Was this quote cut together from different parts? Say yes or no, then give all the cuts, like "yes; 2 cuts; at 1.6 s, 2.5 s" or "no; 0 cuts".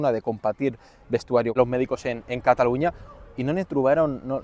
yes; 1 cut; at 1.6 s